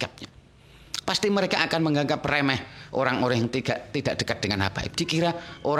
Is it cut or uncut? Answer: uncut